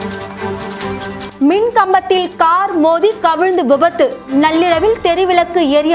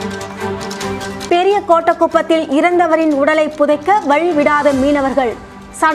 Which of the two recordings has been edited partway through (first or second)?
first